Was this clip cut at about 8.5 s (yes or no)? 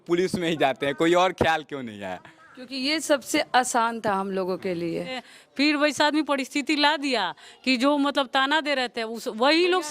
no